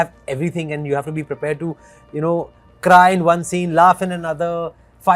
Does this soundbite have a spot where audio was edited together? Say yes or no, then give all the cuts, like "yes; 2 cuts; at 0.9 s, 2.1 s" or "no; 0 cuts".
no; 0 cuts